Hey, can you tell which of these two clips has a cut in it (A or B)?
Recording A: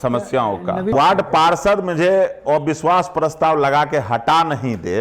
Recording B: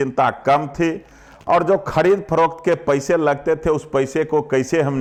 A